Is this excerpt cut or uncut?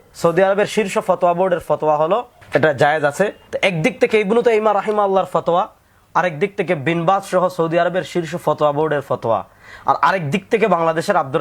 cut